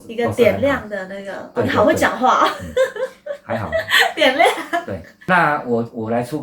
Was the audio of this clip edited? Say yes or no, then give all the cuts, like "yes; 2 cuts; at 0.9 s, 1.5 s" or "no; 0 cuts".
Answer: yes; 1 cut; at 5.2 s